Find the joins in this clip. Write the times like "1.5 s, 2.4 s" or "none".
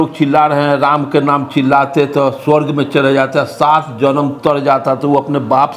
none